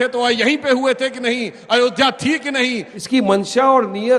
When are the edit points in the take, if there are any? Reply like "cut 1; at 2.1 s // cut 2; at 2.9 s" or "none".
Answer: cut 1; at 2.9 s